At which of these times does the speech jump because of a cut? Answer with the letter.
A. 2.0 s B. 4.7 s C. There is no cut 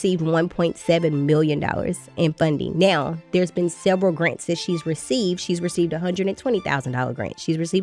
C